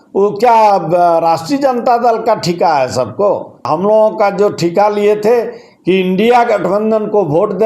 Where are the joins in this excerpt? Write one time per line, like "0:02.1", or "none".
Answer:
0:03.7